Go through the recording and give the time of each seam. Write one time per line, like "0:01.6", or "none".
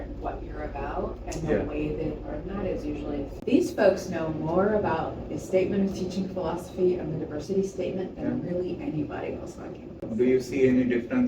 0:03.3
0:10.0